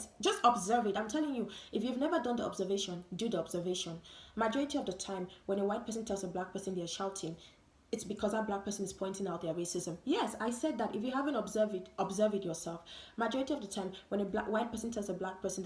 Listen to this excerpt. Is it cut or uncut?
uncut